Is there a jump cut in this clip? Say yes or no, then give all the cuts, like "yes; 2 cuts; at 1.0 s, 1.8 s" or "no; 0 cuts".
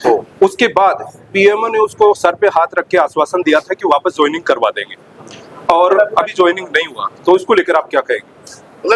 no; 0 cuts